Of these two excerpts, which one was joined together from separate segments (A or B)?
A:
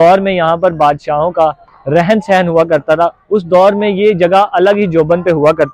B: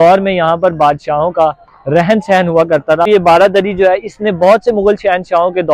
B